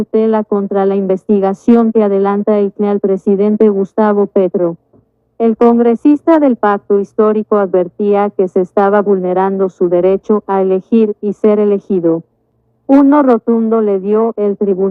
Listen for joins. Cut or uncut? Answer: uncut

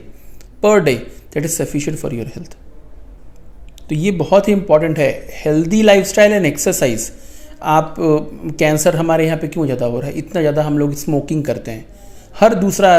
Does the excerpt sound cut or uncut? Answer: uncut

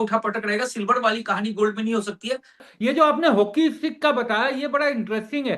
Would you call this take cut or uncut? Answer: cut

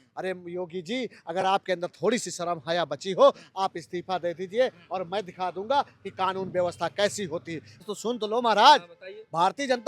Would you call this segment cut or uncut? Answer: cut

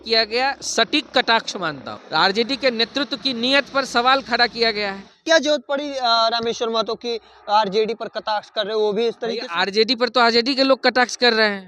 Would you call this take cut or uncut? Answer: cut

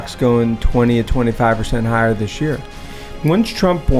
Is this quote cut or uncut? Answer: cut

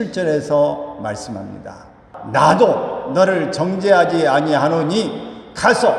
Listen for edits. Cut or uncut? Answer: cut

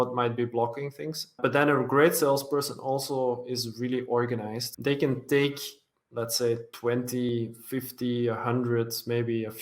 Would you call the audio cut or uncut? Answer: cut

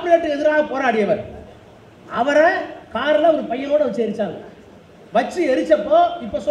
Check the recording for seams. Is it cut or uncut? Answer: uncut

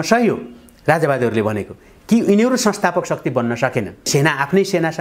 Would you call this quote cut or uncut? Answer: cut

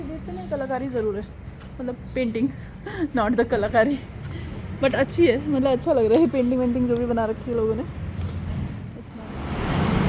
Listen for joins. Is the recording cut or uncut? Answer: cut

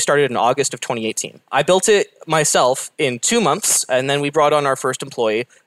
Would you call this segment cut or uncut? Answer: cut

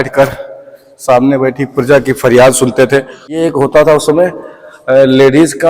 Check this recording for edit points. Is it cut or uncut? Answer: cut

